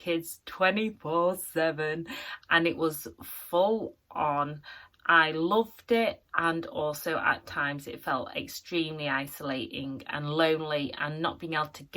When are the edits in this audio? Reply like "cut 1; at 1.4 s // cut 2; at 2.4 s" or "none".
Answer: none